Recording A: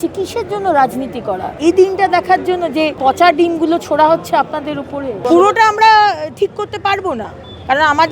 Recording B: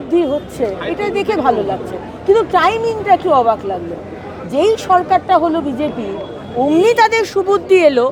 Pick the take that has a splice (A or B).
A